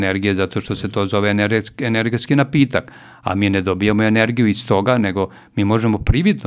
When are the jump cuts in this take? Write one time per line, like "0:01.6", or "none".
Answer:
none